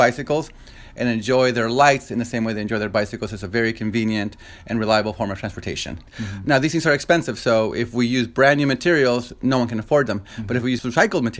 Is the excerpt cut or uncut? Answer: cut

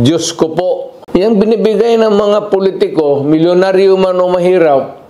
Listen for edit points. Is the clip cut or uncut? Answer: cut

